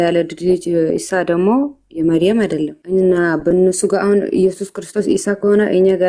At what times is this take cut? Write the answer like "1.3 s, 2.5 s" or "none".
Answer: 2.8 s